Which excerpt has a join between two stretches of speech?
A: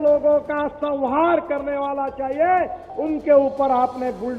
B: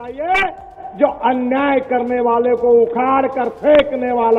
A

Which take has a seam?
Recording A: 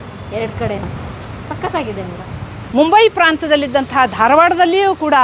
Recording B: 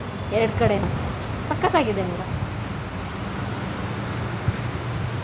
A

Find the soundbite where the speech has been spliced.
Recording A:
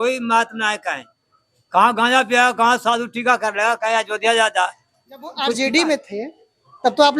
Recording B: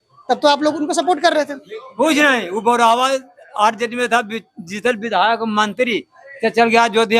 A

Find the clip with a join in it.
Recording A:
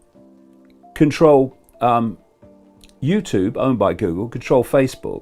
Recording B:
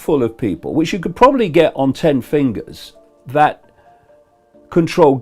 B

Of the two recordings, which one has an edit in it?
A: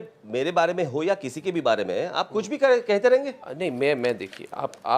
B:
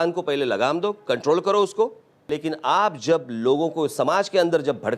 B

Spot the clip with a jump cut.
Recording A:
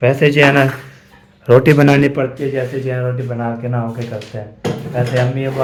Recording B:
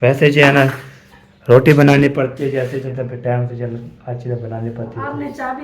B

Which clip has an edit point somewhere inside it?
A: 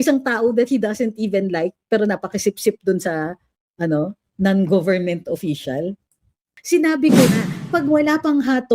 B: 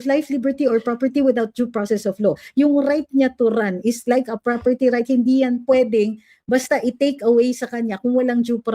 A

